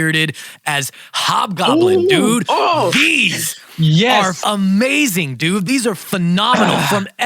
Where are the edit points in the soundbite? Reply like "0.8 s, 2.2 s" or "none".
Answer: 4.4 s